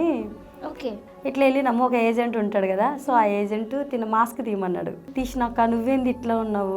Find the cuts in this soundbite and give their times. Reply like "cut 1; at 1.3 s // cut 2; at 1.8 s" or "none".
cut 1; at 0.9 s // cut 2; at 5.0 s